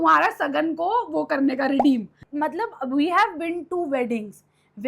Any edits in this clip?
yes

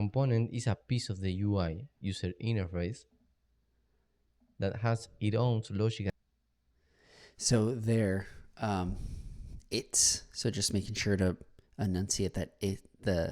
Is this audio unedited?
yes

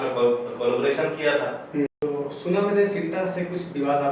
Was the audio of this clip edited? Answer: yes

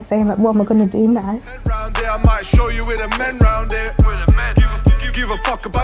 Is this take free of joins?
no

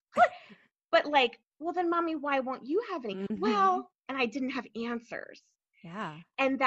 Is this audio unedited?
no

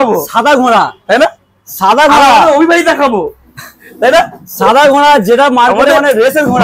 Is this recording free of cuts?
yes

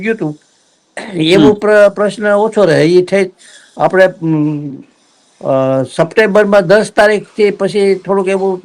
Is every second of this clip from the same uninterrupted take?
yes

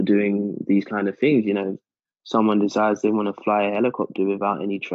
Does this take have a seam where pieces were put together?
no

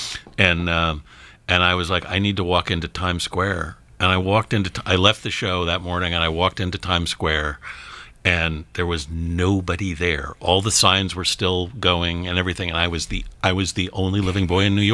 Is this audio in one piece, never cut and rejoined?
yes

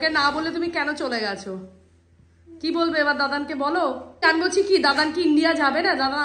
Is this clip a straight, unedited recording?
yes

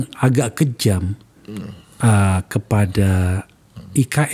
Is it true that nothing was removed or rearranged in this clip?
yes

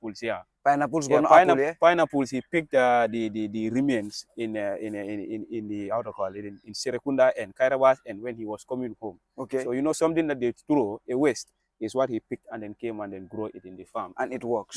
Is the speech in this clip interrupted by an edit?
no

